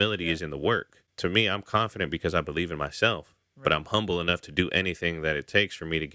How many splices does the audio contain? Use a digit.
1